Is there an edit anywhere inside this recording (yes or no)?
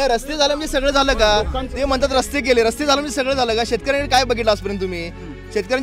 no